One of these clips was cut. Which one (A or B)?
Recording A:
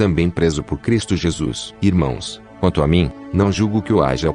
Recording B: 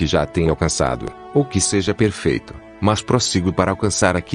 A